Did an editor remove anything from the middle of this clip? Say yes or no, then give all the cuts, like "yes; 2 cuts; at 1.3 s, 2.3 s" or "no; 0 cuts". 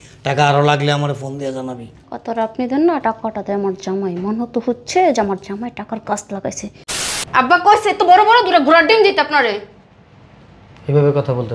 yes; 1 cut; at 7.0 s